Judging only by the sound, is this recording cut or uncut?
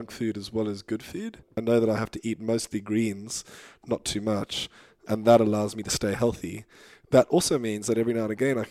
cut